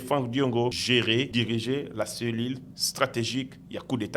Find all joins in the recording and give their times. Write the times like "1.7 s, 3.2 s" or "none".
1.1 s